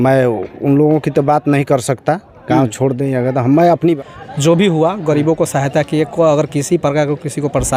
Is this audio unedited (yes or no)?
no